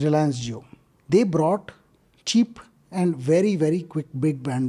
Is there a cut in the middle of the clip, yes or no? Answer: no